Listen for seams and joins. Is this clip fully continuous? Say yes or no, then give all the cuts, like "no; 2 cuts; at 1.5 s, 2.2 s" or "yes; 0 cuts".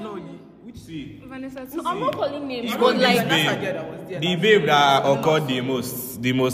yes; 0 cuts